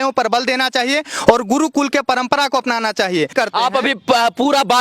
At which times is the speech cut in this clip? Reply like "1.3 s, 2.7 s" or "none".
3.3 s

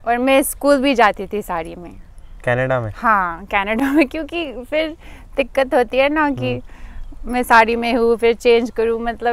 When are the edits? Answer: none

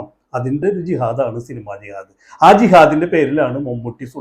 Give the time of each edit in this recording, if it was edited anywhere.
none

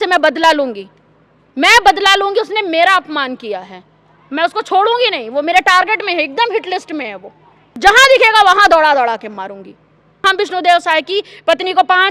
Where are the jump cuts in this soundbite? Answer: 7.8 s, 10.2 s

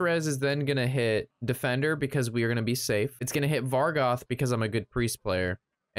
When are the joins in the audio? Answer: 1.3 s, 3.2 s

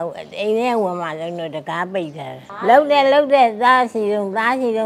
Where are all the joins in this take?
2.5 s

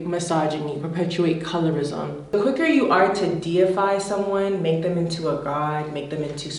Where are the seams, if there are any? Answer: 2.3 s

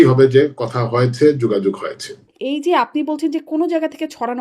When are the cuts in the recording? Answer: 2.3 s

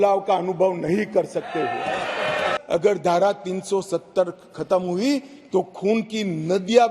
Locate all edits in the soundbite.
2.6 s

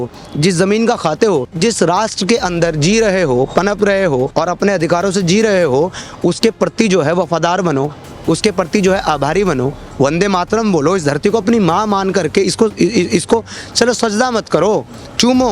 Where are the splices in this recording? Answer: 1.6 s, 4.3 s

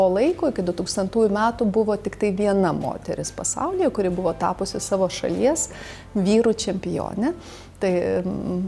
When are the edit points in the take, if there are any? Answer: none

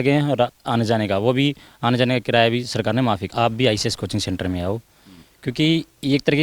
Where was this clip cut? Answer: 3.3 s

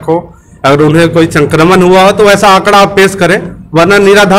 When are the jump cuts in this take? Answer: none

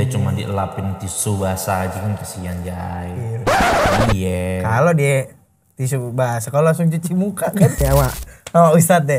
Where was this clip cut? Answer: 7.8 s

